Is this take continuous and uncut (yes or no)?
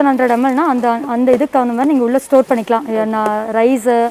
yes